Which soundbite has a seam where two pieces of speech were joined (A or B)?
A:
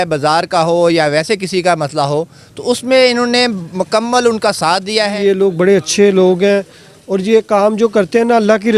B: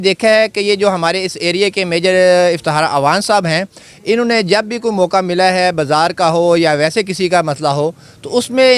A